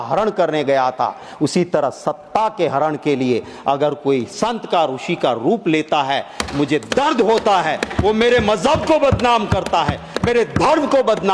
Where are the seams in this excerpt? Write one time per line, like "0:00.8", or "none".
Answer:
none